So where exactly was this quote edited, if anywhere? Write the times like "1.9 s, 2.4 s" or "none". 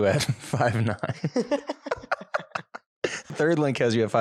3.3 s